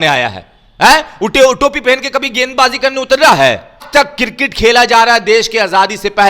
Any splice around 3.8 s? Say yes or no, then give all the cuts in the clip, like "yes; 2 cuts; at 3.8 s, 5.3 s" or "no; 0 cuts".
yes; 1 cut; at 3.8 s